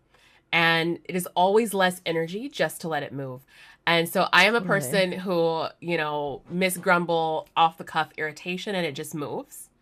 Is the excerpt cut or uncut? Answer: uncut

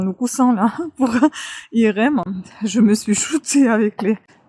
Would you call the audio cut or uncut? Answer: uncut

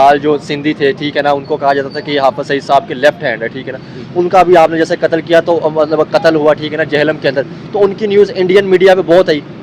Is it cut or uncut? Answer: uncut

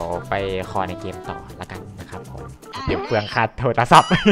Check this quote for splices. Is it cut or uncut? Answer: uncut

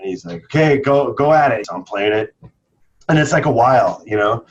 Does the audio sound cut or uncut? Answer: cut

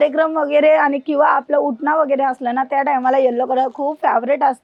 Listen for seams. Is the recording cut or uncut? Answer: uncut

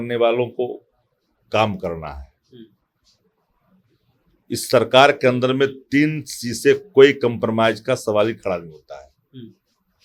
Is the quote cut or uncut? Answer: uncut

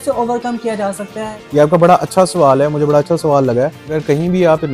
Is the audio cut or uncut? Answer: cut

